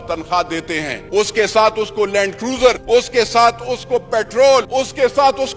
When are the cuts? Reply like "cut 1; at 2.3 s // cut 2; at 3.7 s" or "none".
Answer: cut 1; at 0.9 s // cut 2; at 2.8 s // cut 3; at 4.7 s